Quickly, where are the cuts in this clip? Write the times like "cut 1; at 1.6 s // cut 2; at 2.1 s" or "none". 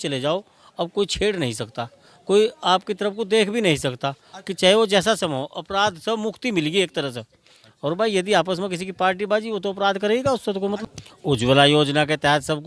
none